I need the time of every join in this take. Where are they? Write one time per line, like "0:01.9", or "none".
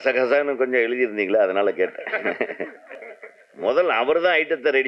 0:02.9